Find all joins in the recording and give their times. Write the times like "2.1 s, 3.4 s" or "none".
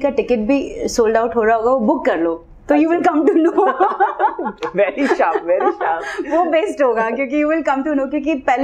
none